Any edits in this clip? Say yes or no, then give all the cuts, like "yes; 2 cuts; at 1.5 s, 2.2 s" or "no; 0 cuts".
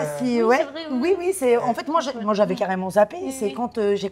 no; 0 cuts